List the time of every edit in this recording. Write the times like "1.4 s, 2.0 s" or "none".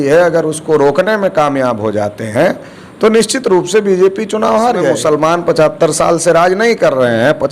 5.0 s